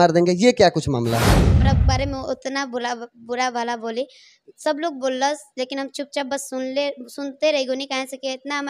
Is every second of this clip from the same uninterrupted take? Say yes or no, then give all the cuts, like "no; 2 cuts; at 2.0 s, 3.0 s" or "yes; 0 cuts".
no; 1 cut; at 1.6 s